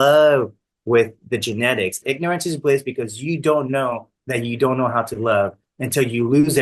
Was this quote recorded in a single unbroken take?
no; 1 cut; at 2.0 s

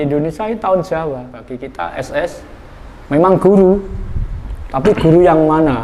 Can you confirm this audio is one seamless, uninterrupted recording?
no; 1 cut; at 1.6 s

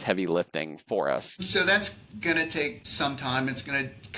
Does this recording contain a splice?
yes; 2 cuts; at 1.4 s, 2.8 s

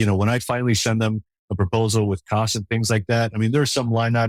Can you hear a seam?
no; 0 cuts

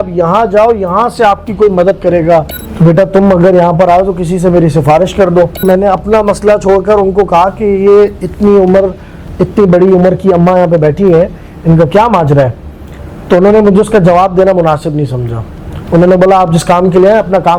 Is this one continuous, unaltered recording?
no; 2 cuts; at 2.6 s, 5.6 s

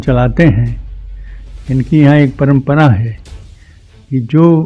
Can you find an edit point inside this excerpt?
no; 0 cuts

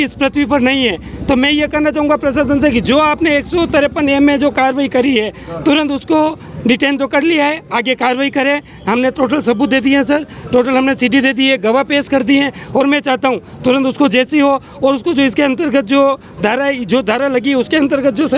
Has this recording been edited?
no; 0 cuts

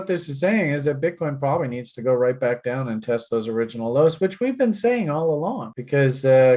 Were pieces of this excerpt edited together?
no; 0 cuts

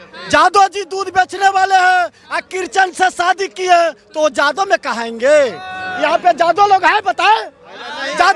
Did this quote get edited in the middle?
no; 0 cuts

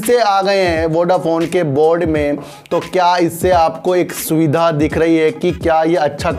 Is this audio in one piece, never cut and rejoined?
yes; 0 cuts

